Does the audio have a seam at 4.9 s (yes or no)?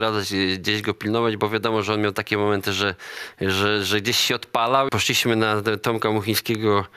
yes